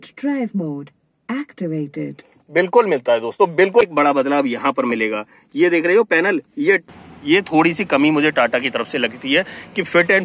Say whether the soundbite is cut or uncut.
cut